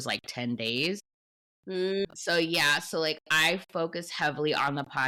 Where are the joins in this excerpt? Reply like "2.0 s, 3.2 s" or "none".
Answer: none

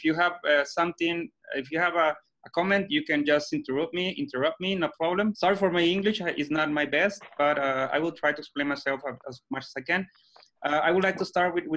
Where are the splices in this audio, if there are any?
5.4 s

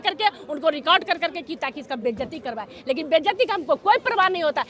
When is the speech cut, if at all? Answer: none

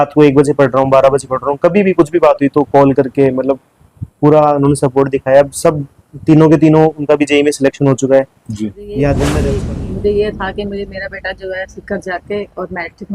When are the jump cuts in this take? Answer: 9.4 s

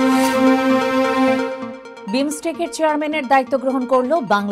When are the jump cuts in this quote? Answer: none

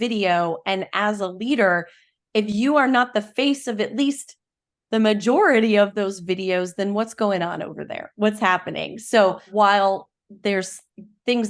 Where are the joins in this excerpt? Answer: 5.9 s, 9.5 s

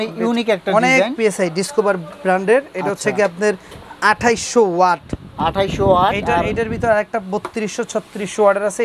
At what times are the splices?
none

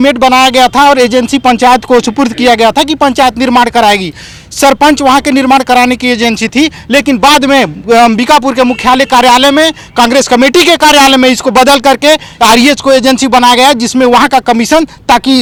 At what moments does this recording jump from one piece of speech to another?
none

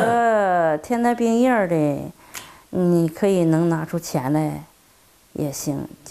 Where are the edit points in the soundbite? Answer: none

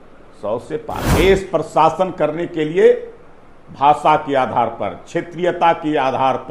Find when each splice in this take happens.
1.0 s

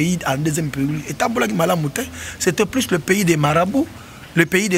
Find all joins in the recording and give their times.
none

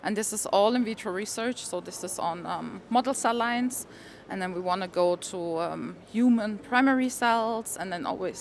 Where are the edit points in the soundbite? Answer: none

